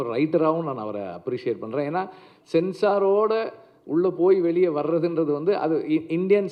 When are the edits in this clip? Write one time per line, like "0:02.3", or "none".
none